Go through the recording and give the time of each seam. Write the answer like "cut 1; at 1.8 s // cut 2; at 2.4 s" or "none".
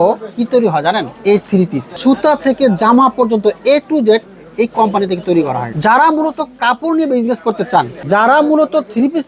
cut 1; at 1.5 s // cut 2; at 5.7 s // cut 3; at 8.0 s